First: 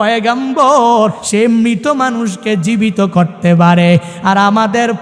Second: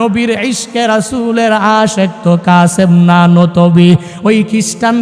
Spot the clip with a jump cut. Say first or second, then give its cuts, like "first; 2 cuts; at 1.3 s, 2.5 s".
first; 1 cut; at 1.2 s